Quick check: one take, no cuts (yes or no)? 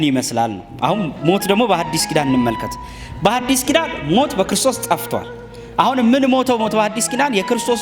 yes